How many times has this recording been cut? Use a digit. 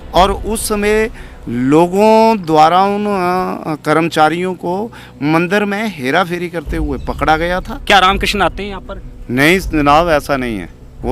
1